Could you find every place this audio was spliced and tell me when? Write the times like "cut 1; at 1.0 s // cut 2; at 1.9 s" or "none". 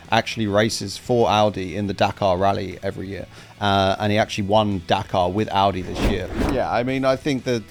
cut 1; at 6.3 s